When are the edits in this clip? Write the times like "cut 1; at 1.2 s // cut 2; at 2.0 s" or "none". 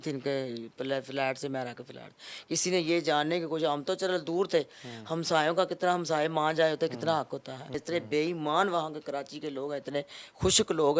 cut 1; at 7.7 s